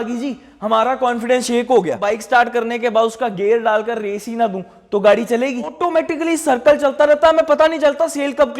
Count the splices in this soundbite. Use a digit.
2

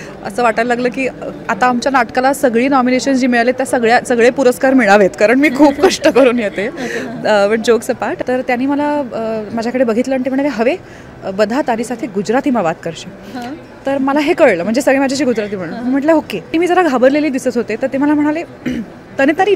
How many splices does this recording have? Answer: 2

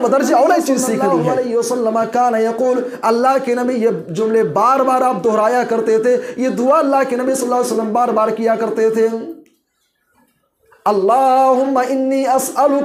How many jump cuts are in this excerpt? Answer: 1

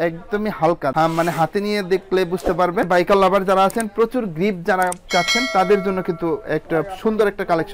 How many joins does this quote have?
1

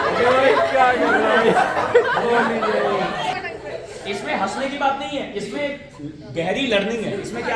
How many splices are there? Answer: 1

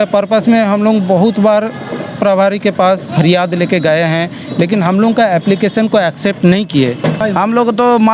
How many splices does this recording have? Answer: 2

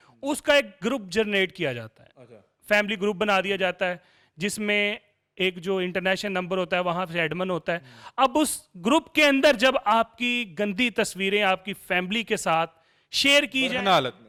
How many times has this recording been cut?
0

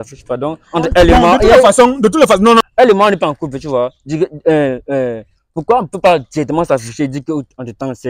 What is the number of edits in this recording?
1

